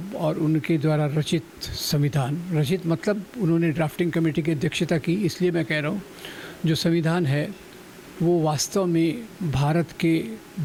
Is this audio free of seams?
yes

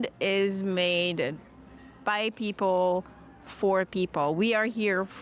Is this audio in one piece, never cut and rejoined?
yes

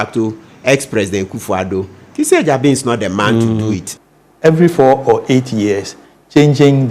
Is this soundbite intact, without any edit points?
no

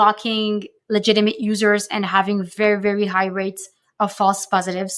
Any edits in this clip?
no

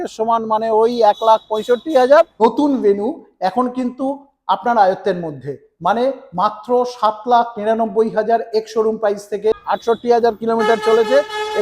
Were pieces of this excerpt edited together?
yes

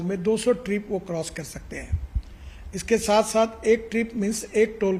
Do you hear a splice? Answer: no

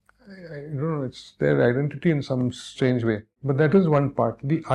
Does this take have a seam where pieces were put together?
yes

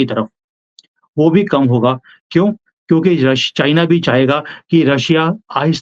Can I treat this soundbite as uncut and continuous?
yes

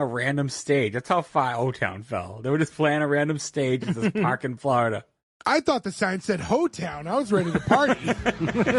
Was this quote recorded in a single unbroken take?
yes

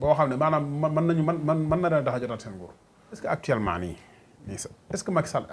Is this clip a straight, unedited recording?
no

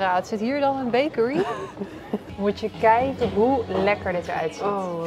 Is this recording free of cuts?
no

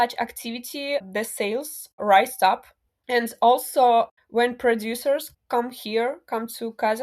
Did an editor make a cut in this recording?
yes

